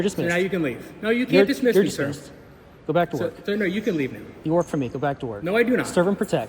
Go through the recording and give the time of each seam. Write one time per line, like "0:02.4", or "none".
none

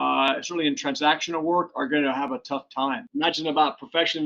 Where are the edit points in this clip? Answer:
0:03.0

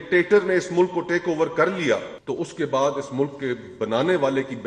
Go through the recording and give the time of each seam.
0:02.1

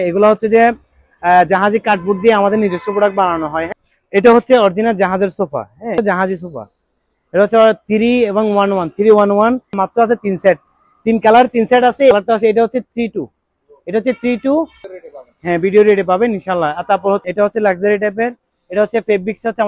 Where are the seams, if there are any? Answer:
0:03.7
0:06.0
0:09.7
0:12.1
0:14.8
0:17.2

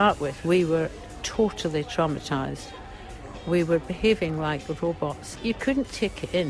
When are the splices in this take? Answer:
0:05.3

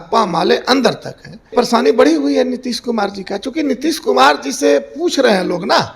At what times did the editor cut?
0:01.5

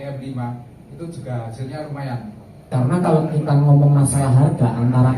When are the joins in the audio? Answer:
0:02.7

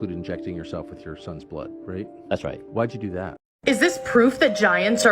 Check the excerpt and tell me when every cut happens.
0:03.4

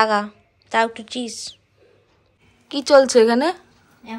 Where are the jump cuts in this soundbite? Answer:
none

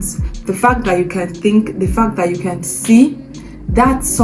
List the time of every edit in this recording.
none

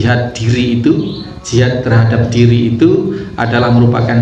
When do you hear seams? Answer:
none

